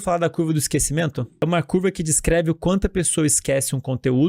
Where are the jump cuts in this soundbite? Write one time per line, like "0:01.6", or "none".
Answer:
0:01.4